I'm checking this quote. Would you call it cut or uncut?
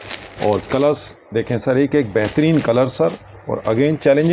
uncut